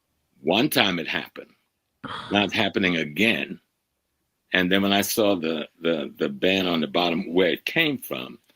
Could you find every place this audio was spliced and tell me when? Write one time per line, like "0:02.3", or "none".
0:06.3